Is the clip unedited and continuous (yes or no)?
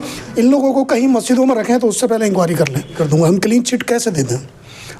no